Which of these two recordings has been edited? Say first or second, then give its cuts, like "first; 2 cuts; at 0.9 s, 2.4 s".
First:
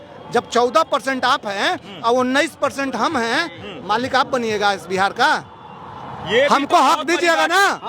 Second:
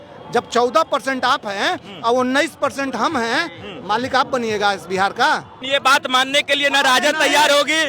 second; 1 cut; at 5.5 s